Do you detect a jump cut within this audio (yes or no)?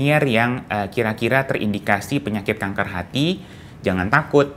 no